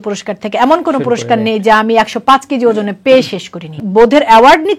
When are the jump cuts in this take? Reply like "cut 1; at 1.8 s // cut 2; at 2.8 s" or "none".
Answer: cut 1; at 3.8 s